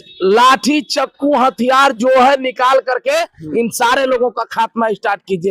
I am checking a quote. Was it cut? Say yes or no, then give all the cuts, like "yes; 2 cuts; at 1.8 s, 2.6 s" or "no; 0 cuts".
no; 0 cuts